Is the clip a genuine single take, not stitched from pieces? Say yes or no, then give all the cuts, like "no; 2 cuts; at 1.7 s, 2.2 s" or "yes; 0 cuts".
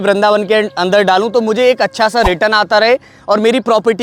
yes; 0 cuts